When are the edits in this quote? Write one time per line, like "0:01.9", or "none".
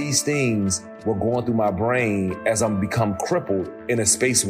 none